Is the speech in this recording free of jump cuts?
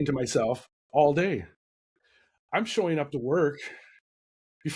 yes; 0 cuts

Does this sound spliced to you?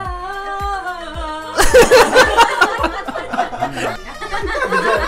yes; 1 cut; at 4.0 s

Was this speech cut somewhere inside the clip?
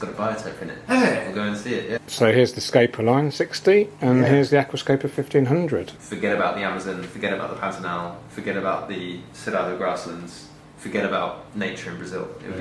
yes; 2 cuts; at 2.0 s, 6.0 s

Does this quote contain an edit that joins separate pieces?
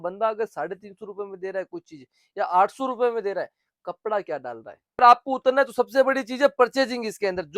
yes; 1 cut; at 5.0 s

